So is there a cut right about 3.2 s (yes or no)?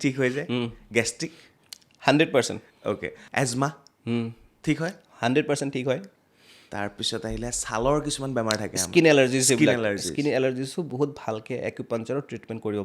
yes